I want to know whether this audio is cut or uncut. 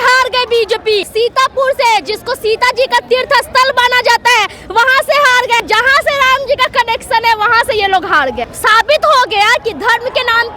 cut